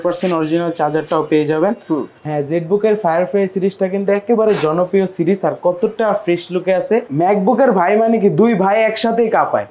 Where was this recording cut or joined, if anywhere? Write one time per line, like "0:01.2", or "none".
0:02.2
0:07.1